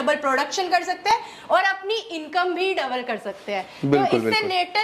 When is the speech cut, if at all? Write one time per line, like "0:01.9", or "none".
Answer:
none